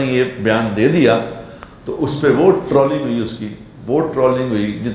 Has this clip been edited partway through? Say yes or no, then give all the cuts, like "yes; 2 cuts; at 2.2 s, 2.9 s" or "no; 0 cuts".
no; 0 cuts